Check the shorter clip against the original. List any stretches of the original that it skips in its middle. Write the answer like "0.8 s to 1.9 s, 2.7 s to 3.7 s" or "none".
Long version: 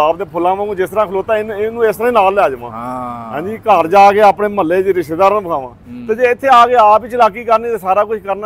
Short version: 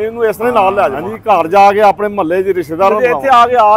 2.7 s to 3.5 s, 5.4 s to 6.2 s